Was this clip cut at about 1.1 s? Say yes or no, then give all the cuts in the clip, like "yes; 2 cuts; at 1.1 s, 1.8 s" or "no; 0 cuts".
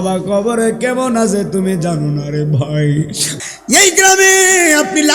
no; 1 cut; at 3.2 s